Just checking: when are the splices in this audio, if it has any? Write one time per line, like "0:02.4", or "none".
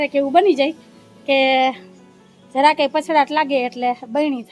none